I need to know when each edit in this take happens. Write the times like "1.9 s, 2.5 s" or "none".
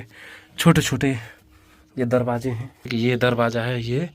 2.7 s